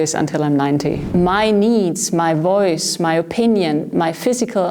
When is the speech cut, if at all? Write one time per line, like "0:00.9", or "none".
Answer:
0:01.0